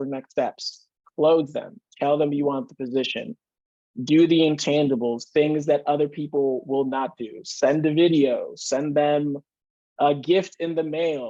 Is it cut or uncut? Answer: uncut